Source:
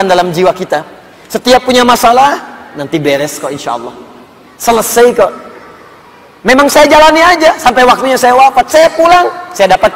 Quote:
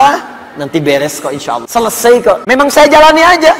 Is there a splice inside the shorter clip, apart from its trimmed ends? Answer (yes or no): yes